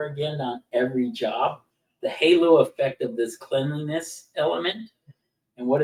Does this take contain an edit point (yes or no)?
no